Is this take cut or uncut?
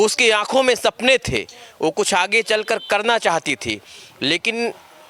uncut